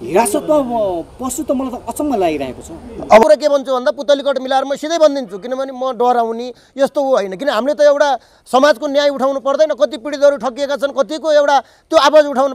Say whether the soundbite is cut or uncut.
cut